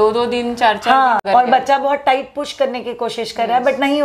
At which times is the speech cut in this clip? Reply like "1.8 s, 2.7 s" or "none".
1.2 s